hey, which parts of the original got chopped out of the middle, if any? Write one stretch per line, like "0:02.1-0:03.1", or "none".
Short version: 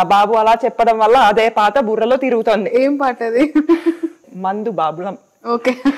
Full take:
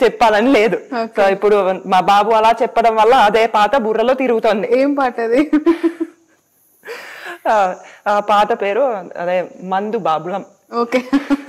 0:06.3-0:09.6

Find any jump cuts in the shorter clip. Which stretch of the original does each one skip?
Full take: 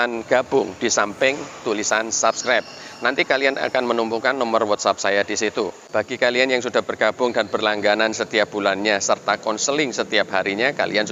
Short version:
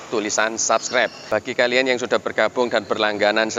0:02.7-0:05.8

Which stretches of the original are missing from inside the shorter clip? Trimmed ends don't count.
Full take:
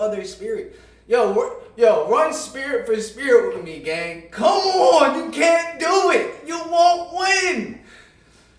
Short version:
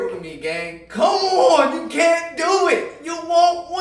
none

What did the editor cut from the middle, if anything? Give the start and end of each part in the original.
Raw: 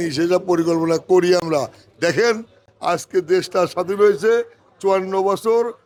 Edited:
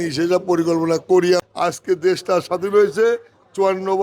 0:01.4-0:02.7

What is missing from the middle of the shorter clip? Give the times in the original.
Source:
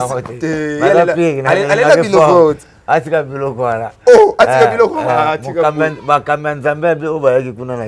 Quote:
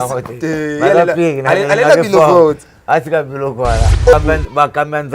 0:04.1-0:05.7

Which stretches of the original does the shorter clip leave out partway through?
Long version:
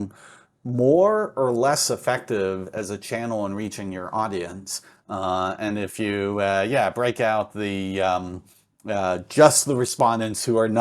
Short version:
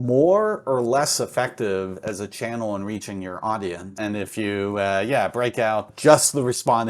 0:04.7-0:05.6
0:07.5-0:09.2

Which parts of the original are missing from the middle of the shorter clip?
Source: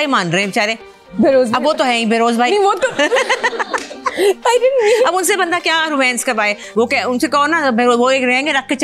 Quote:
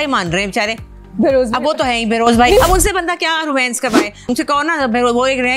0:02.6-0:05.0
0:06.7-0:07.1

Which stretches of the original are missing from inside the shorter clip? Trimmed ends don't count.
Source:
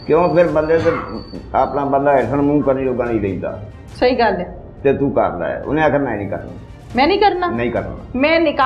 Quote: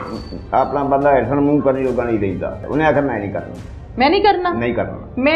0:03.6-0:05.6

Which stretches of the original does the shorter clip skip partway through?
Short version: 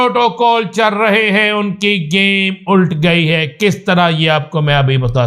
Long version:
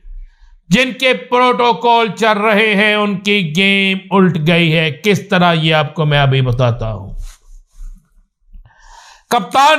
none

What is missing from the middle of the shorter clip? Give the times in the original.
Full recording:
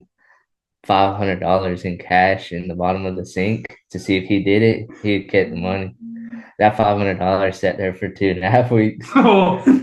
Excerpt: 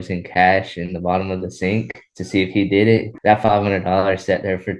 0:04.9-0:06.5

